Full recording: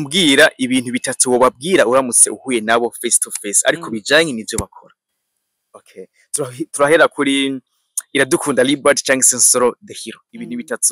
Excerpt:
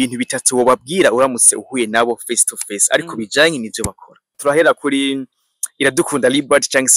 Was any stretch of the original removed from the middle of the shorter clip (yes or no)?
yes